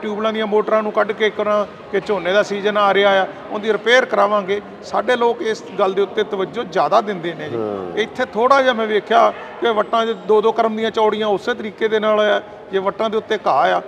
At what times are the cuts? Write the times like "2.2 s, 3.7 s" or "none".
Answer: none